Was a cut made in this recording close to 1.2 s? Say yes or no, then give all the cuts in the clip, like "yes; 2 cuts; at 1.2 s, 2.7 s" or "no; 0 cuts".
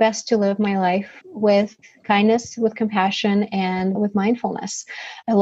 yes; 2 cuts; at 1.2 s, 3.9 s